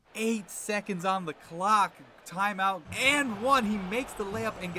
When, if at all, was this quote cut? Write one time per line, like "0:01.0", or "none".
0:02.9